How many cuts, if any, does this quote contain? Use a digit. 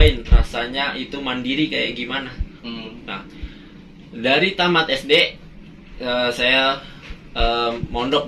0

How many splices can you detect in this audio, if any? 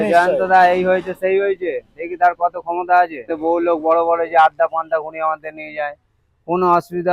1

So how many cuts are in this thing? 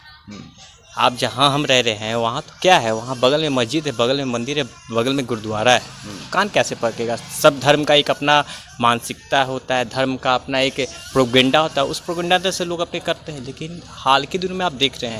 0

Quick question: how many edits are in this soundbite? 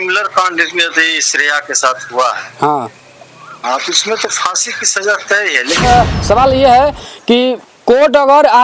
1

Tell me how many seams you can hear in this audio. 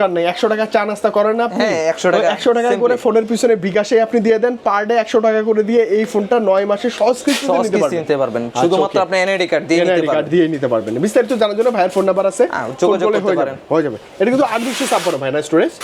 0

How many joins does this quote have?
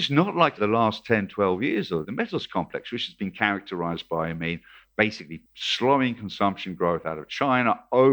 1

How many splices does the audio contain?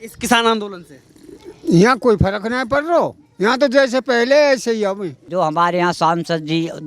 1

